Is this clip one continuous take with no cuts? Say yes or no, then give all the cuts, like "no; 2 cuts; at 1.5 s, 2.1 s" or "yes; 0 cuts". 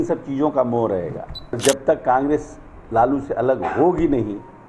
no; 1 cut; at 1.6 s